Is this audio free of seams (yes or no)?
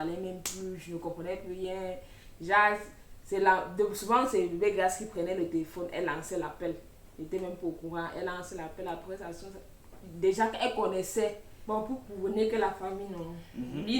no